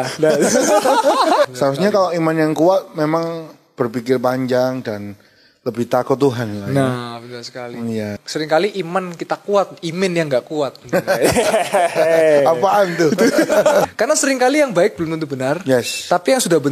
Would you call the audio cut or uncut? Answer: cut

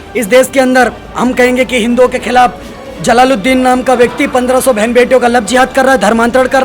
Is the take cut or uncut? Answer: uncut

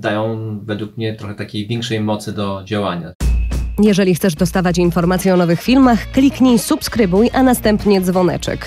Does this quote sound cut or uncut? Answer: cut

